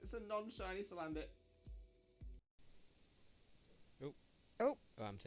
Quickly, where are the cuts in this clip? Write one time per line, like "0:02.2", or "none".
0:02.4